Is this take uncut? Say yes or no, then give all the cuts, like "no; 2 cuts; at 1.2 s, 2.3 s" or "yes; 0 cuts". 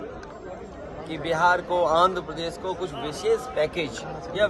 yes; 0 cuts